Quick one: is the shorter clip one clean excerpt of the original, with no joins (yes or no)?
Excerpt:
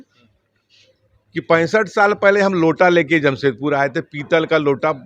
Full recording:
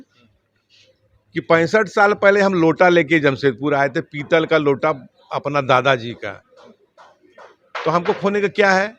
yes